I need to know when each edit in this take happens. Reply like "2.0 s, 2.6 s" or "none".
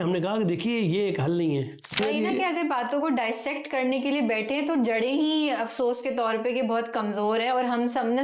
2.0 s